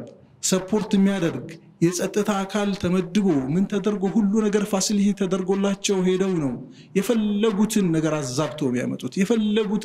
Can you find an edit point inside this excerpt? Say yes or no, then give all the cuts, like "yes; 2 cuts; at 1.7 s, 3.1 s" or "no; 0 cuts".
no; 0 cuts